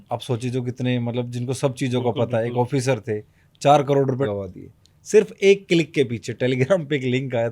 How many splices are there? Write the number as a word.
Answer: one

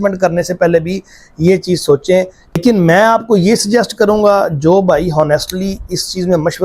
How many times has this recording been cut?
one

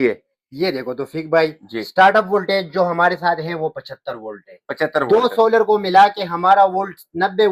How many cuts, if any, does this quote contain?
zero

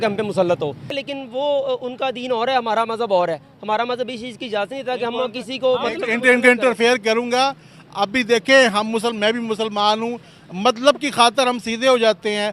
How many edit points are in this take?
one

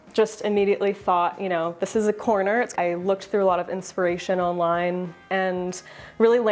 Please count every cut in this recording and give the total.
two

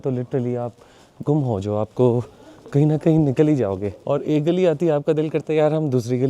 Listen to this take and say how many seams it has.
one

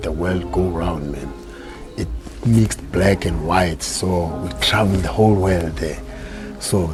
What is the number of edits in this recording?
zero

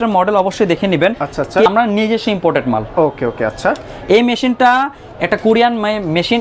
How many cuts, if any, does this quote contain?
one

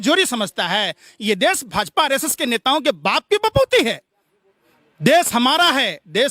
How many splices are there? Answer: zero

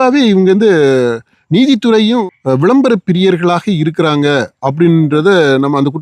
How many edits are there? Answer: one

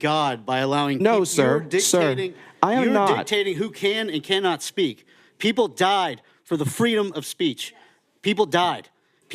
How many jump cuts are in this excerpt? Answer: one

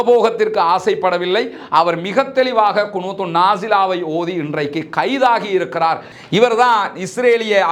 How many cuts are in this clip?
one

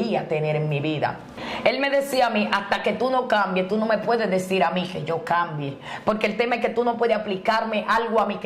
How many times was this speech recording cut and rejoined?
one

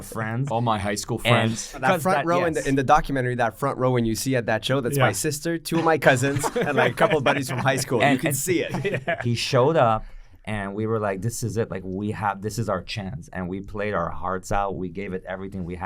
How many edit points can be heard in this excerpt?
two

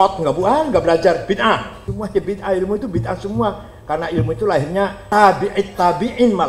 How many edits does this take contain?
two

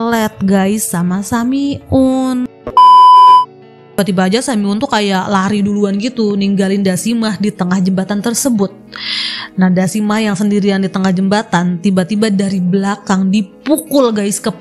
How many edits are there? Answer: two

